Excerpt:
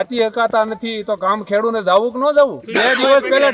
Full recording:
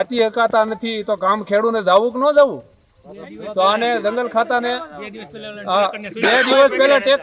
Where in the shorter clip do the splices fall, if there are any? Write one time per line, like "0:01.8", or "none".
0:02.6